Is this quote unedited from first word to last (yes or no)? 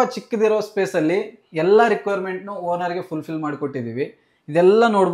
yes